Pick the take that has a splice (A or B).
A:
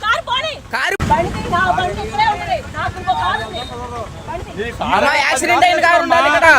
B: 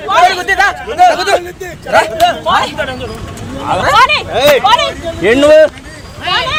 A